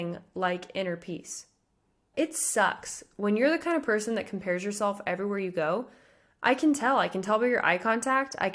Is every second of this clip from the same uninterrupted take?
no; 1 cut; at 2.0 s

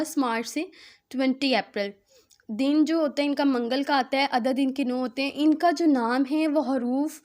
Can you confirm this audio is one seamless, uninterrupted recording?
yes; 0 cuts

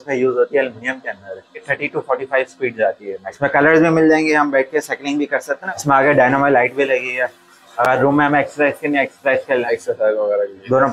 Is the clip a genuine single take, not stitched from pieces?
no; 3 cuts; at 1.7 s, 3.3 s, 5.5 s

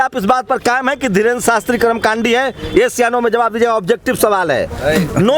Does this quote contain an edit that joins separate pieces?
no; 0 cuts

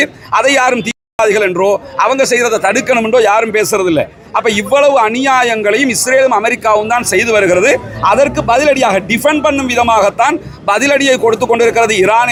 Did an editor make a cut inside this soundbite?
no; 0 cuts

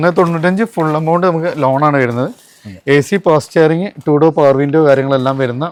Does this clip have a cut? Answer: no; 0 cuts

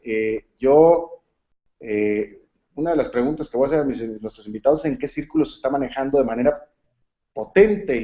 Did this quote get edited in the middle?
yes; 1 cut; at 6.1 s

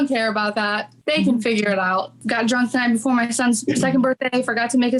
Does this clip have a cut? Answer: yes; 1 cut; at 2.2 s

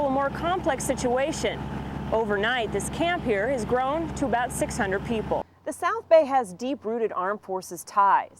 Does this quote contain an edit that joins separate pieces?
yes; 1 cut; at 5.5 s

